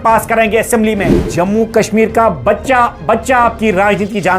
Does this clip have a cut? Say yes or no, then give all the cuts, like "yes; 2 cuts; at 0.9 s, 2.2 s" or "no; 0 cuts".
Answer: yes; 1 cut; at 1.2 s